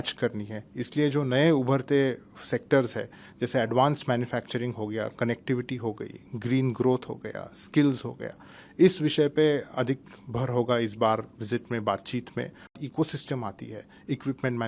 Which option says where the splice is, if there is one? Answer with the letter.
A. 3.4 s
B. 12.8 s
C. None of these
B